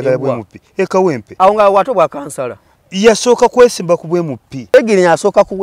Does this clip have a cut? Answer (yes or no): yes